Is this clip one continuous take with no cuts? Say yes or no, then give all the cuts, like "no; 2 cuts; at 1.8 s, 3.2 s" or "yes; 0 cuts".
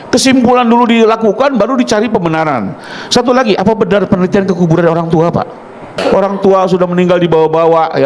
no; 1 cut; at 5.9 s